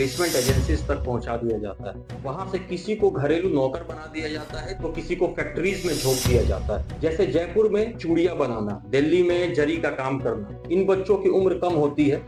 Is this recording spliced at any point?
no; 0 cuts

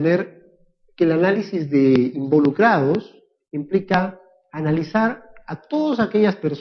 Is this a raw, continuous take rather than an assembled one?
yes; 0 cuts

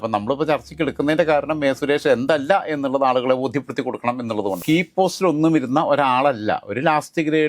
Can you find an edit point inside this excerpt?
yes; 1 cut; at 4.6 s

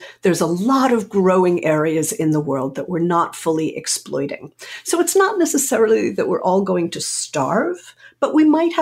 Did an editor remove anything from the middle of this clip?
no; 0 cuts

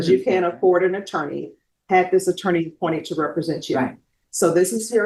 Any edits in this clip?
no; 0 cuts

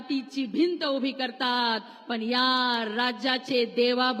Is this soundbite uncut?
yes; 0 cuts

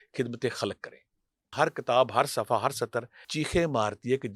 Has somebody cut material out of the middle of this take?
yes; 2 cuts; at 1.5 s, 3.2 s

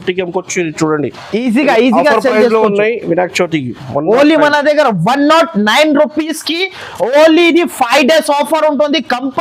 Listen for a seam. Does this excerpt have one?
no; 0 cuts

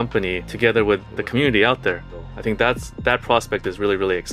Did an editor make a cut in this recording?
no; 0 cuts

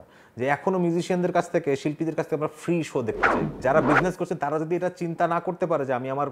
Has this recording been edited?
yes; 1 cut; at 3.6 s

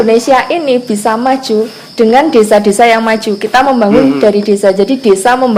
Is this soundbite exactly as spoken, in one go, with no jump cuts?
yes; 0 cuts

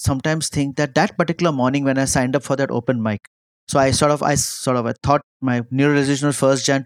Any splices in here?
no; 0 cuts

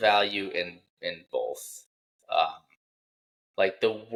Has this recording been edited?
no; 0 cuts

